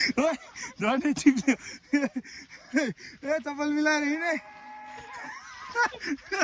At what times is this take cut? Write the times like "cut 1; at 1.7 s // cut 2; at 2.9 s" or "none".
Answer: none